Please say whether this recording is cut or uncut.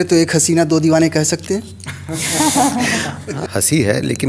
cut